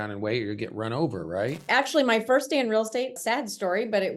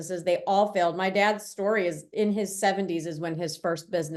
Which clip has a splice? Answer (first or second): first